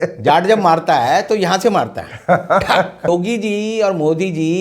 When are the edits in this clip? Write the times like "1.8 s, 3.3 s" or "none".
3.1 s